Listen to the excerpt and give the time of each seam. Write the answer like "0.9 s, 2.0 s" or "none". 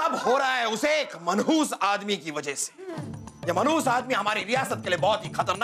none